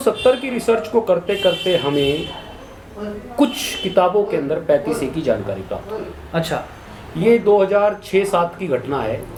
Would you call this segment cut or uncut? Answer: uncut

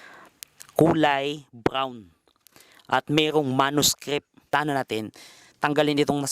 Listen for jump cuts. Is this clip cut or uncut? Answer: cut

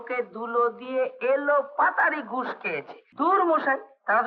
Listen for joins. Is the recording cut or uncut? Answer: cut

